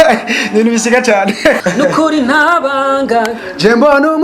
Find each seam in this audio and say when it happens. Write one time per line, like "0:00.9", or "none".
0:01.6